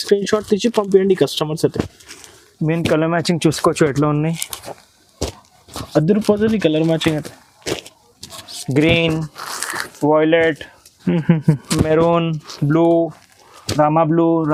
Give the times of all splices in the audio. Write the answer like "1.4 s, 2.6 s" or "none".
none